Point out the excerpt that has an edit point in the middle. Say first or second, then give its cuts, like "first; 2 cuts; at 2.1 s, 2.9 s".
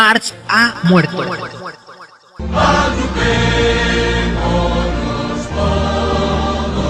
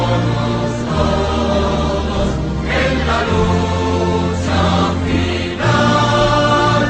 second; 1 cut; at 5.1 s